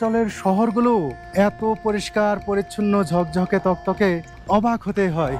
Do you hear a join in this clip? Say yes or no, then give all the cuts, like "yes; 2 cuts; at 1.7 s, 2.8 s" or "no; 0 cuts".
yes; 2 cuts; at 1.2 s, 4.3 s